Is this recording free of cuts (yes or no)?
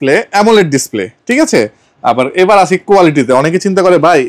yes